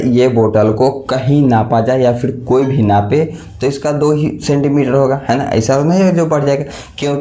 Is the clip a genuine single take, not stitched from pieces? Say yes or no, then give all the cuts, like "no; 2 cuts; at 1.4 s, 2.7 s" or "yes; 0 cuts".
yes; 0 cuts